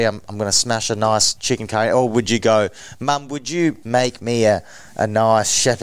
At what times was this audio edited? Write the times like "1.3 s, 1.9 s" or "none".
1.3 s, 3.8 s

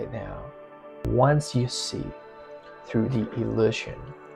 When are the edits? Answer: 1.0 s

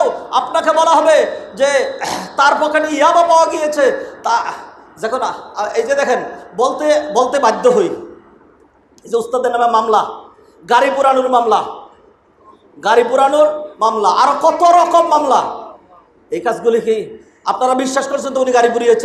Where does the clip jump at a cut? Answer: none

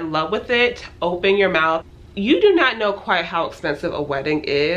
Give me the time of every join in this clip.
1.9 s

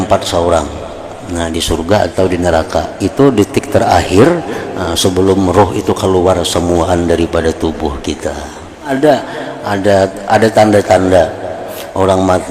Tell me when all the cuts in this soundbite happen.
8.9 s

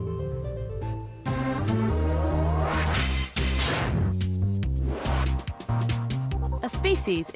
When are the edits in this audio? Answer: none

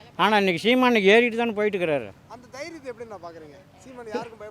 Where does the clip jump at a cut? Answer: none

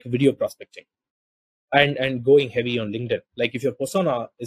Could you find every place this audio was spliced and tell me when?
1.6 s

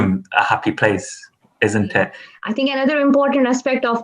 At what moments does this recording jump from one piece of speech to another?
2.2 s

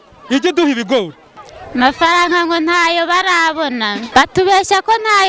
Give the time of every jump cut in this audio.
1.2 s, 4.0 s

